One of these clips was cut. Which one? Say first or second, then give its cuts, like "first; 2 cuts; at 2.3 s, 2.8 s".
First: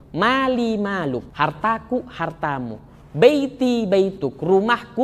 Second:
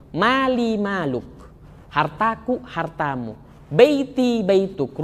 first; 1 cut; at 1.3 s